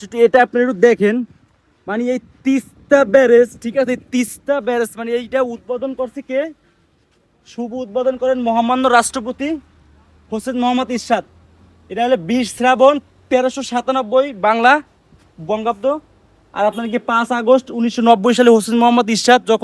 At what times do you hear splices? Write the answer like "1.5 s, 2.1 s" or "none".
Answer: none

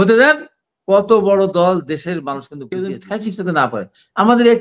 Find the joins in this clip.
2.6 s

